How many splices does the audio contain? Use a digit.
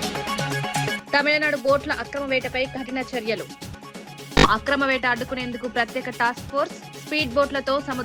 1